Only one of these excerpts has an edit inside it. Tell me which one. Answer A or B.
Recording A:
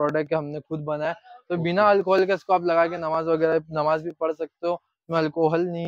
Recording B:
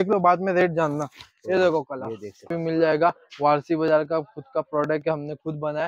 B